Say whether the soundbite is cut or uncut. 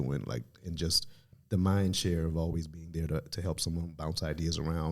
uncut